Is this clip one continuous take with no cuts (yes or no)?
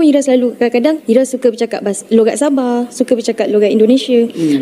yes